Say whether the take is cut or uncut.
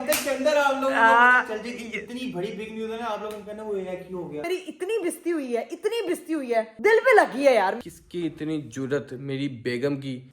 cut